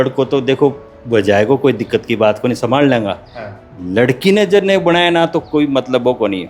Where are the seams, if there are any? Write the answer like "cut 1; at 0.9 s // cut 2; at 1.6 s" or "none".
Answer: none